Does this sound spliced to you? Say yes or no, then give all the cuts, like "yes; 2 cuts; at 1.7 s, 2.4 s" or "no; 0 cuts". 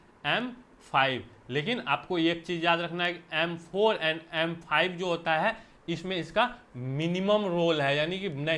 no; 0 cuts